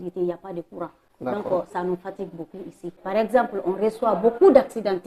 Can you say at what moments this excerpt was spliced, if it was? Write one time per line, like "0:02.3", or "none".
0:01.0
0:02.9